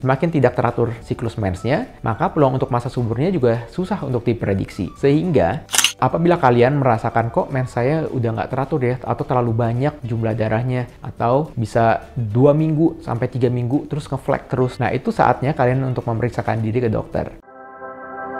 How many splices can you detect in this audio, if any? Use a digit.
2